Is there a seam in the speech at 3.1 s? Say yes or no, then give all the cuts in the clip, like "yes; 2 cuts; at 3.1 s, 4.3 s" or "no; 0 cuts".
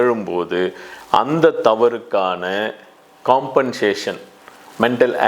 no; 0 cuts